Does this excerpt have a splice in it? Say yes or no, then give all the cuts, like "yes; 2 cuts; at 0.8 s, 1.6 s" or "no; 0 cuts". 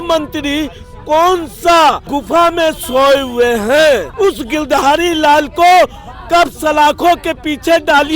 yes; 2 cuts; at 2.0 s, 4.1 s